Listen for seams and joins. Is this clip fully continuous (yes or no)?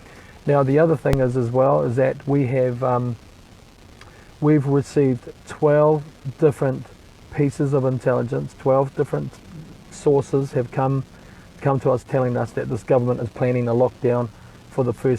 no